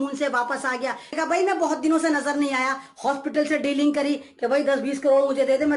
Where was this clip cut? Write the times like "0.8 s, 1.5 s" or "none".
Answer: 1.2 s